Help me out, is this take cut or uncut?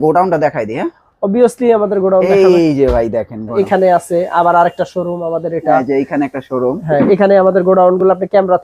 uncut